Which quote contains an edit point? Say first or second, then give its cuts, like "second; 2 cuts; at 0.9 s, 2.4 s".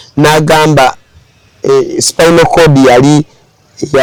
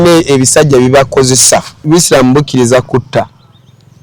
second; 1 cut; at 1.8 s